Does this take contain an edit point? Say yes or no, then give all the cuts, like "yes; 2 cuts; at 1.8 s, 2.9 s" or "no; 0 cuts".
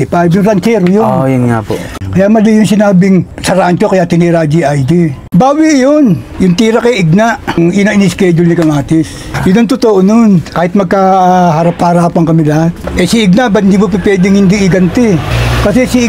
yes; 4 cuts; at 1.9 s, 5.2 s, 7.5 s, 12.8 s